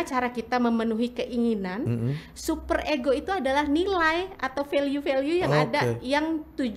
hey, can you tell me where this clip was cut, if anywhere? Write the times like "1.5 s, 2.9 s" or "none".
none